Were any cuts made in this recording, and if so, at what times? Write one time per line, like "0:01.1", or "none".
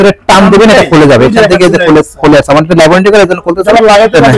none